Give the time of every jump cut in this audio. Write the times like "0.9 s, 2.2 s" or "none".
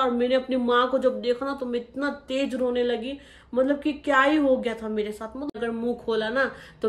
5.6 s